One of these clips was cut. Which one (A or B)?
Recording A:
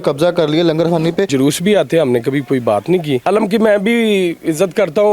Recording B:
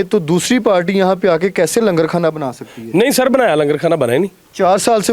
A